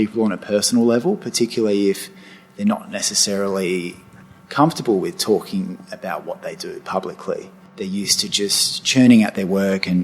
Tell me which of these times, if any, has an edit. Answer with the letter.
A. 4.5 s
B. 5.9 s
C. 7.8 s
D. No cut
C